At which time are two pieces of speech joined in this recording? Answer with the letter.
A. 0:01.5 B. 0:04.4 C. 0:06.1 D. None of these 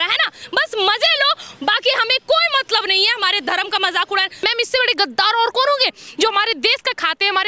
B